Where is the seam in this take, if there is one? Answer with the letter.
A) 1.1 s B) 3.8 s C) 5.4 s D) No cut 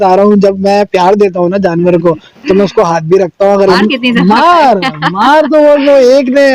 B